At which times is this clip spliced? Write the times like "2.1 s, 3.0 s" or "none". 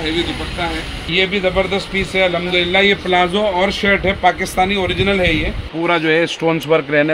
1.0 s, 5.7 s

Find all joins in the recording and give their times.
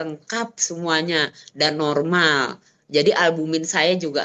none

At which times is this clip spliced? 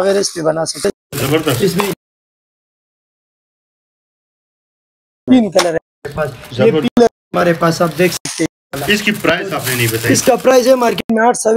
none

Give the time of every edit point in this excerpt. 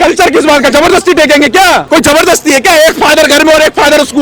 1.8 s

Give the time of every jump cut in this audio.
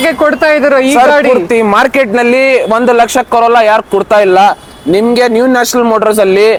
none

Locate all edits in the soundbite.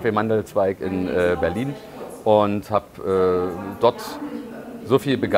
none

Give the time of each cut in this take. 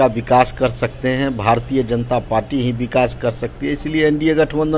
none

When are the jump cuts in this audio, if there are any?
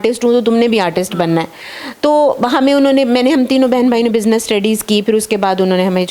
none

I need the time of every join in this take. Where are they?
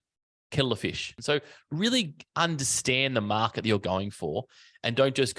1.1 s

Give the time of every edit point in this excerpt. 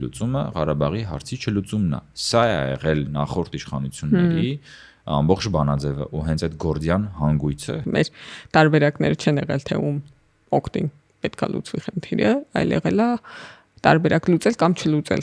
7.8 s

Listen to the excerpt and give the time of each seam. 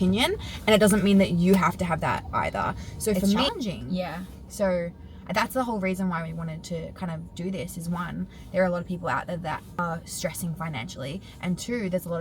3.5 s

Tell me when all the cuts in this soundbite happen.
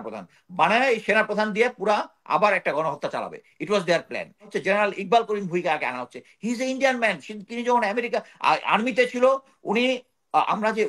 4.5 s

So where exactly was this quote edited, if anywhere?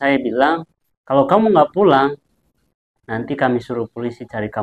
none

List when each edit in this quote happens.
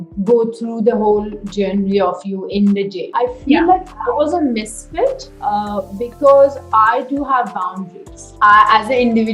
3.1 s, 8.2 s

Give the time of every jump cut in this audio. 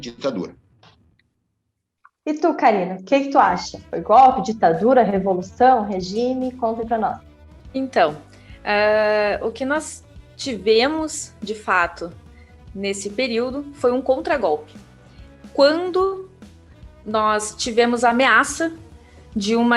none

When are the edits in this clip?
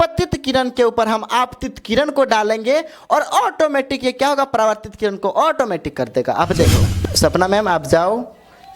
6.8 s

